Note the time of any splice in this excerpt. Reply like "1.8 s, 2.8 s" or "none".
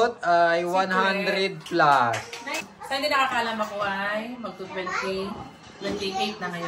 2.7 s